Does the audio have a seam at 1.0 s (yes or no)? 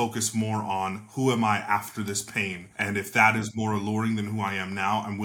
no